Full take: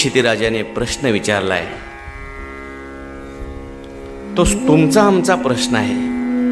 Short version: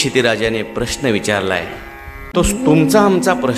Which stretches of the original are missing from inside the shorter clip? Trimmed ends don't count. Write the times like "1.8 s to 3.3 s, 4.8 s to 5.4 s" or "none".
2.2 s to 4.2 s